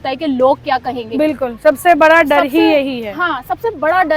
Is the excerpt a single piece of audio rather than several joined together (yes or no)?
yes